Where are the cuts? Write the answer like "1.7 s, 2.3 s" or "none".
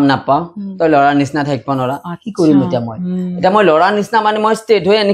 none

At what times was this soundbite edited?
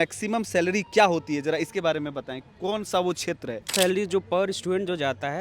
3.7 s

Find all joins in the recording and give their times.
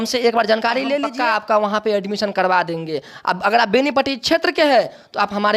none

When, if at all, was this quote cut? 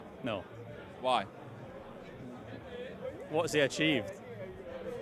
none

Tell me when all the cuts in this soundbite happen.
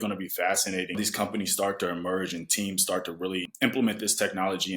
1.0 s, 3.5 s

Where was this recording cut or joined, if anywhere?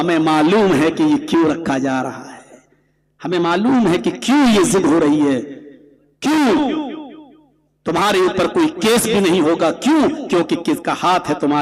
none

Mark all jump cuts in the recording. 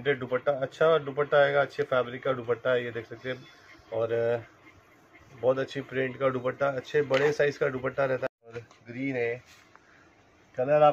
8.4 s

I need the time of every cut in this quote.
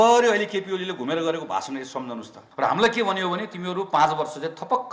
2.4 s

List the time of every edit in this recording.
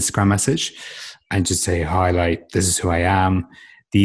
1.2 s

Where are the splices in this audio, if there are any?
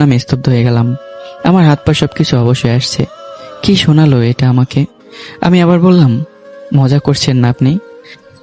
none

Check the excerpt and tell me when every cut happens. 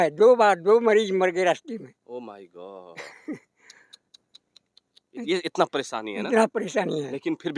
none

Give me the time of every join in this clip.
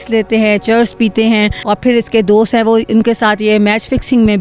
1.6 s

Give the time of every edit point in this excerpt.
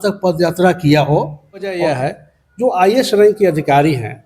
1.8 s

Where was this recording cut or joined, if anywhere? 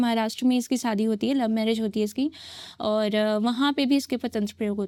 none

